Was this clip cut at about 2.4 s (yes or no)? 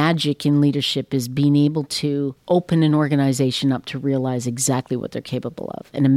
yes